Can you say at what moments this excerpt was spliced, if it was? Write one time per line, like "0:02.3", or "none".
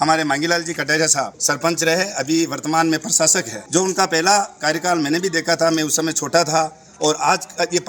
0:01.4
0:03.5